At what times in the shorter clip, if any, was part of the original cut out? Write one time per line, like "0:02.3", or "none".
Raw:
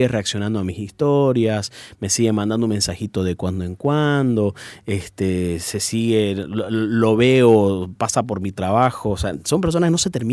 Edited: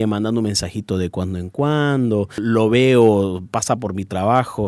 0:02.4